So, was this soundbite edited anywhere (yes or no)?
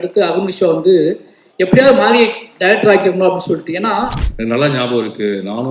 yes